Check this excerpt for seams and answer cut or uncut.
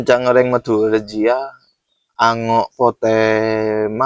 uncut